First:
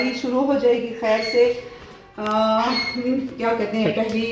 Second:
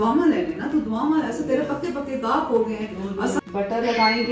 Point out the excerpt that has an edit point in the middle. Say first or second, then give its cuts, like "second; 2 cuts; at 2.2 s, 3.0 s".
second; 1 cut; at 3.4 s